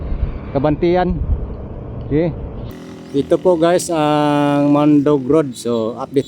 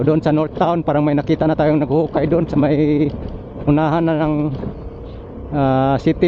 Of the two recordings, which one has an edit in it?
first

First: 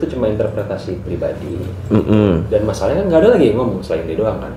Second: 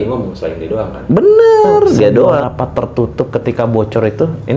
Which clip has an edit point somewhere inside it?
second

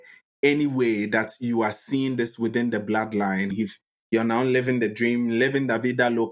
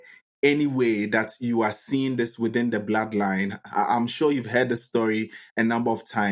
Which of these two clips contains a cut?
first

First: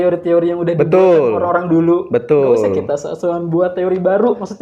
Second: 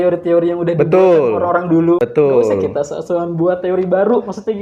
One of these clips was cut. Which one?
second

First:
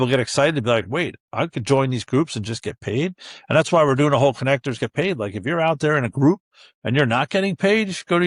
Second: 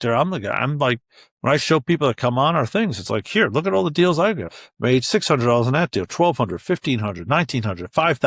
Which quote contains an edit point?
second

